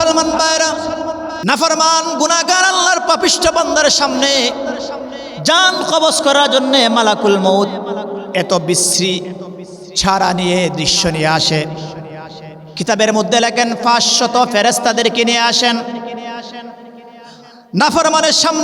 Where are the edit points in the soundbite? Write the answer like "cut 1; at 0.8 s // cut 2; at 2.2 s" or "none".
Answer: cut 1; at 1.3 s